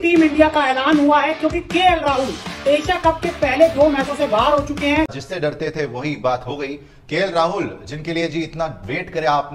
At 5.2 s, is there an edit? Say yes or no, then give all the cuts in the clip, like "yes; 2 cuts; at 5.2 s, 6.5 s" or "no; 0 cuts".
yes; 1 cut; at 5.2 s